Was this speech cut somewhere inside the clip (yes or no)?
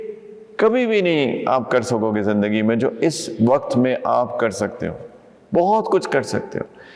no